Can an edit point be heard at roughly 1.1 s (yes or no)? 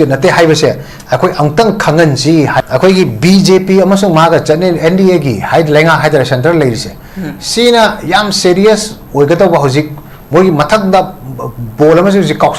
no